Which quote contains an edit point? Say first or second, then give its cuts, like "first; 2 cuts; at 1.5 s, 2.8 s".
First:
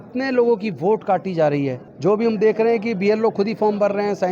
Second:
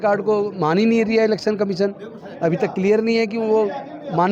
first; 1 cut; at 1.9 s